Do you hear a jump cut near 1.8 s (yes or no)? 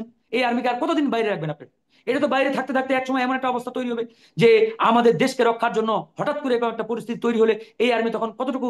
no